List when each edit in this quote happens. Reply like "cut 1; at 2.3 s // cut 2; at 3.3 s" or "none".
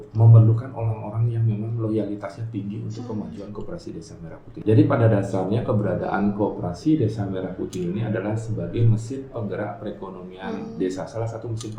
cut 1; at 4.5 s